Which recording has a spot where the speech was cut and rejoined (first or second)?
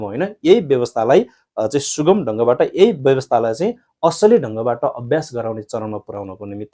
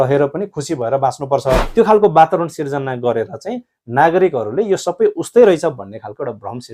second